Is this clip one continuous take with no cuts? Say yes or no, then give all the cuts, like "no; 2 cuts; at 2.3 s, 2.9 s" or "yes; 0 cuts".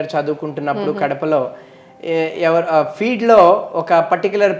yes; 0 cuts